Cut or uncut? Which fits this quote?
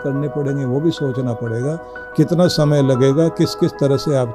uncut